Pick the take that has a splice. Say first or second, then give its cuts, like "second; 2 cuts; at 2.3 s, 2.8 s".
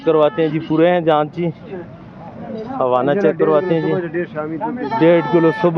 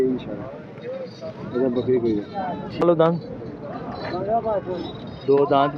second; 1 cut; at 2.8 s